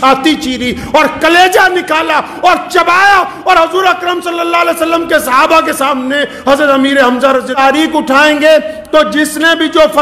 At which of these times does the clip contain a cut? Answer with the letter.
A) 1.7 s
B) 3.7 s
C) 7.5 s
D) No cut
C